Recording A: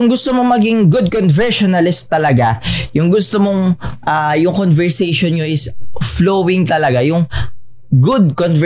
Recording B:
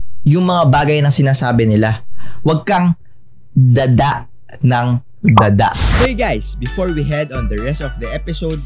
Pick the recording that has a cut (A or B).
B